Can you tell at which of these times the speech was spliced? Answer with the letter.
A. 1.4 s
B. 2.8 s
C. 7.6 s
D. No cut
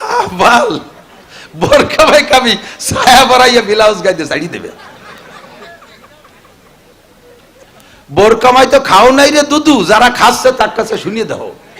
C